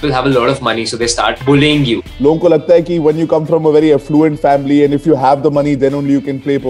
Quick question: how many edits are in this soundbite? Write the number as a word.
two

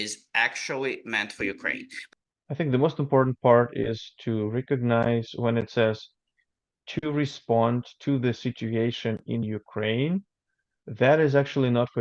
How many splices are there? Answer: one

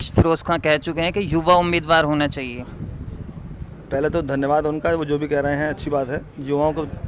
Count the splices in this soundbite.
zero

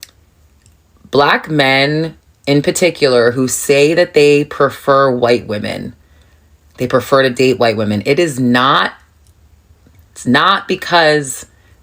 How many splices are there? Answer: zero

